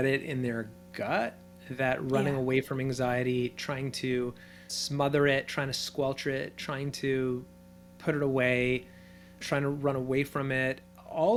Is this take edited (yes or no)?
no